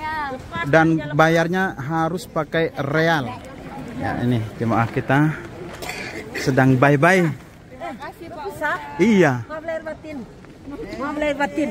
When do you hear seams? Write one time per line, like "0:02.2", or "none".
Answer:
0:03.5